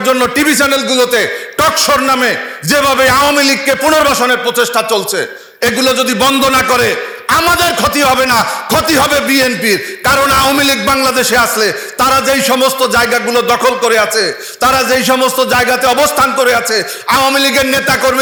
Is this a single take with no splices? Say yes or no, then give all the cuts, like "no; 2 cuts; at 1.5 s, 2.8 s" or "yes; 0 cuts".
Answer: yes; 0 cuts